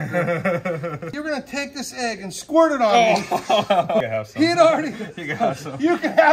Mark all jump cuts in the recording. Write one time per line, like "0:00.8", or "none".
0:01.1
0:04.0